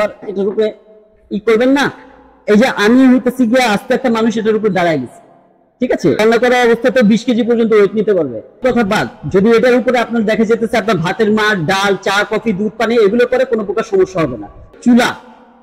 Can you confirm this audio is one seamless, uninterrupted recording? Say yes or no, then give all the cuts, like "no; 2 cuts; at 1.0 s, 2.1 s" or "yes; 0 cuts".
no; 3 cuts; at 6.2 s, 8.6 s, 14.7 s